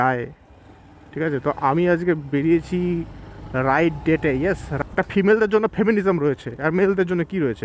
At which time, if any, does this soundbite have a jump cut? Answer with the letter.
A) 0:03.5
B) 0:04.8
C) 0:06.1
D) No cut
B